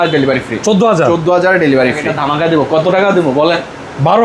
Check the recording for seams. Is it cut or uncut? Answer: cut